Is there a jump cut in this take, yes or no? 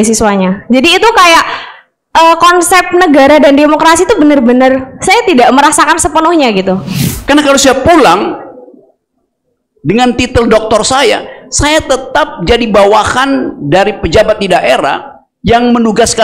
yes